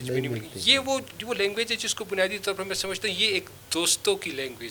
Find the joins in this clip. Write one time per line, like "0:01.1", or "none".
none

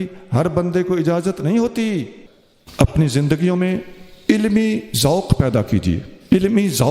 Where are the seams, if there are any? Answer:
0:02.2

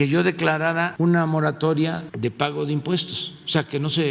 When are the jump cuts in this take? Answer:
0:00.9
0:02.1

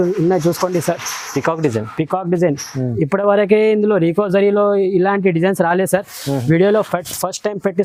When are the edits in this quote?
none

